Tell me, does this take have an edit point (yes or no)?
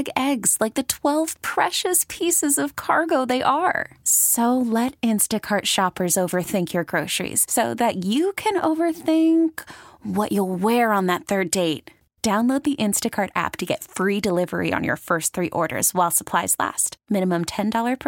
no